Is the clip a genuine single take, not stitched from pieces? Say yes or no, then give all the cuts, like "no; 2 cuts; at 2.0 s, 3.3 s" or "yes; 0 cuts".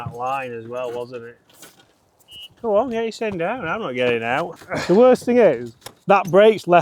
no; 1 cut; at 4.6 s